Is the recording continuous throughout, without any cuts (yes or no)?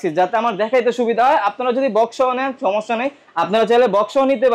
yes